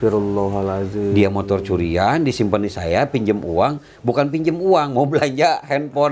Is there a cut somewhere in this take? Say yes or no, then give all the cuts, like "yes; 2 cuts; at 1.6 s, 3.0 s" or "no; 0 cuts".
no; 0 cuts